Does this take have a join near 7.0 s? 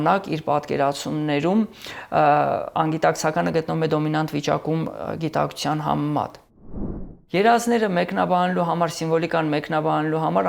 yes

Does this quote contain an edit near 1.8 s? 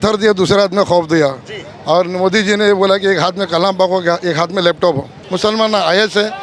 no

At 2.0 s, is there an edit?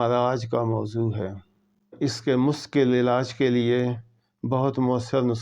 yes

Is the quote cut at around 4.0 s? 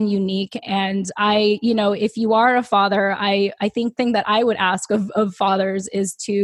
yes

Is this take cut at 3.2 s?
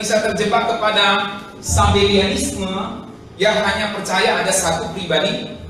no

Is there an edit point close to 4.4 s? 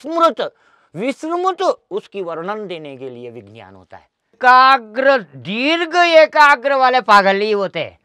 yes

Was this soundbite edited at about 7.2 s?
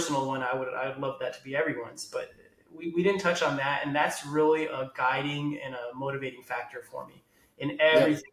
no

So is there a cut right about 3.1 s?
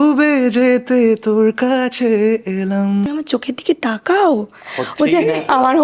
yes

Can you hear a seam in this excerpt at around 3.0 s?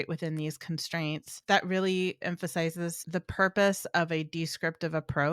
yes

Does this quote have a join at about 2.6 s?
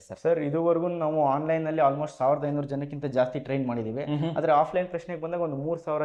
no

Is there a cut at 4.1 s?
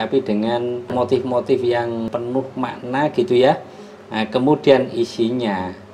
no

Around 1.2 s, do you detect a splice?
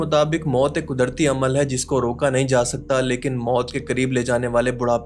no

